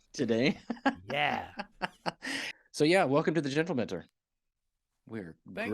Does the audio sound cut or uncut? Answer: cut